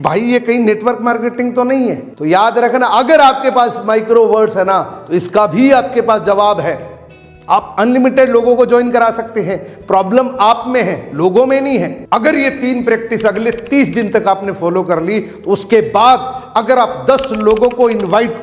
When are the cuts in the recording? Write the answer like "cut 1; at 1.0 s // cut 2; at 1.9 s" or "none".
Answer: cut 1; at 12.0 s

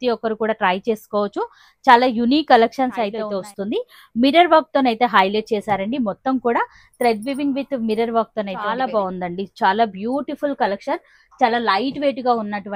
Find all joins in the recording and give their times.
cut 1; at 3.2 s // cut 2; at 8.7 s

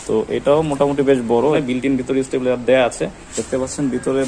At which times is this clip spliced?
cut 1; at 1.6 s // cut 2; at 3.3 s

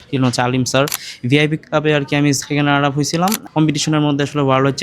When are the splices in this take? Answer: cut 1; at 1.1 s // cut 2; at 3.4 s

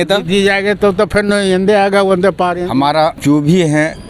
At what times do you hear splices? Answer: cut 1; at 2.7 s

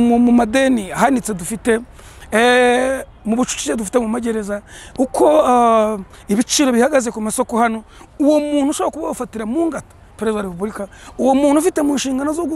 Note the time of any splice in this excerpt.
none

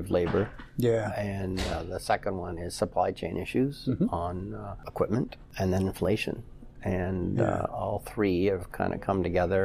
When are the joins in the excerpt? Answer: cut 1; at 4.8 s // cut 2; at 5.4 s

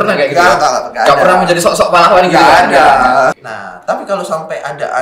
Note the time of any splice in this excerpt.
cut 1; at 3.4 s

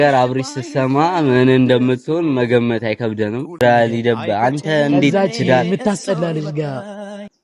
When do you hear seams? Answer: cut 1; at 3.6 s

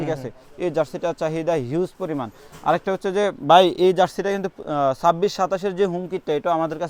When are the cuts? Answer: none

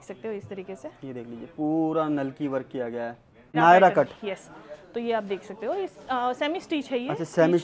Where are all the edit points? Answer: cut 1; at 3.5 s

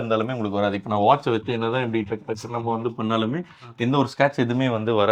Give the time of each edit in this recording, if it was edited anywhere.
none

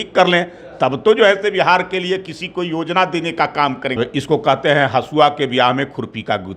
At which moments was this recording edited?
cut 1; at 4.0 s

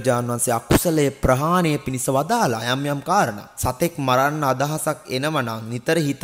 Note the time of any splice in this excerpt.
cut 1; at 3.5 s

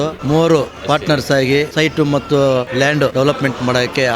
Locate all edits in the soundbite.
cut 1; at 3.1 s

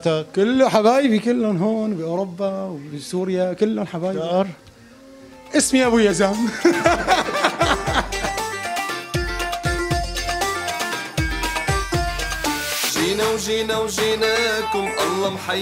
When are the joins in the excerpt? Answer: cut 1; at 8.6 s

